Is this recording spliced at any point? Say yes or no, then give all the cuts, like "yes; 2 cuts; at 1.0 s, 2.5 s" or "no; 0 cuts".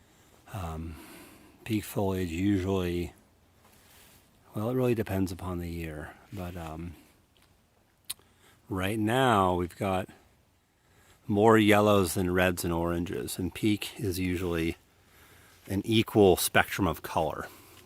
yes; 1 cut; at 14.0 s